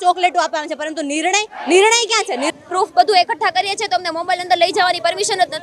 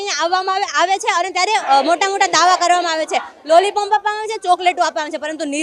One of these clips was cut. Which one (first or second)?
first